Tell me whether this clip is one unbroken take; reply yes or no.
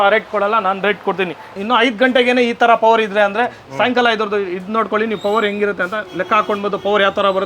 no